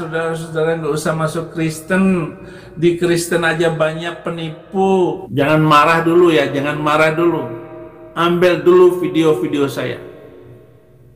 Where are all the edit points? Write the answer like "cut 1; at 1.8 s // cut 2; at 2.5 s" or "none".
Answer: cut 1; at 5.2 s